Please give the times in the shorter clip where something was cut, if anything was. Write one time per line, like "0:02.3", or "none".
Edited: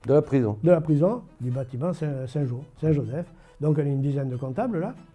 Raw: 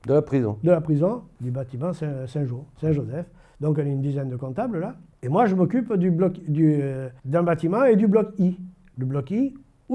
none